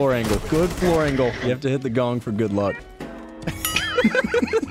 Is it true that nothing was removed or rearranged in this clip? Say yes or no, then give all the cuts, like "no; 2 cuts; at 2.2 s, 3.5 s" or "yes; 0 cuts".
no; 2 cuts; at 1.4 s, 2.8 s